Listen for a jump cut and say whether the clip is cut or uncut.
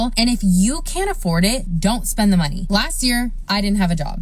uncut